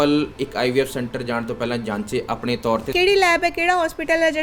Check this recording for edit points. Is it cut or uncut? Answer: cut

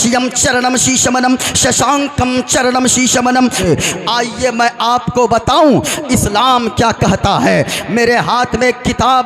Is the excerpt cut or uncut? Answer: cut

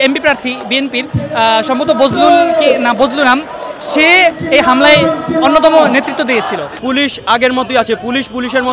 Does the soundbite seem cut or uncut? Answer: cut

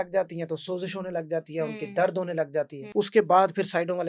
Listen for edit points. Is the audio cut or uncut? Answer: cut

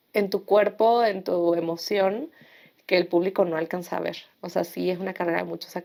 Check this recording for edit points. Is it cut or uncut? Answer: uncut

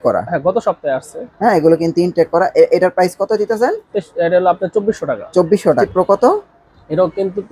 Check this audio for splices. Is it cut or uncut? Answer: cut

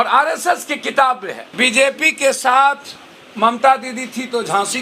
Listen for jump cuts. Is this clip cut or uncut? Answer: cut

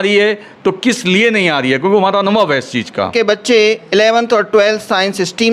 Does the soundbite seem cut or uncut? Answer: cut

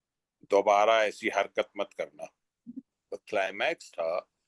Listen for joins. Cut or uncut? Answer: cut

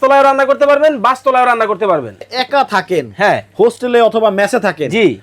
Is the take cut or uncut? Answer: cut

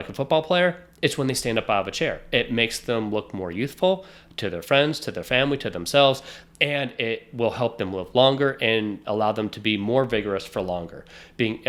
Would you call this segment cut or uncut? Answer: uncut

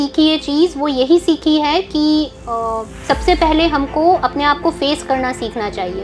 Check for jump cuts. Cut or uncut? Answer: uncut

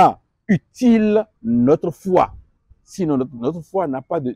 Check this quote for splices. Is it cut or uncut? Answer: uncut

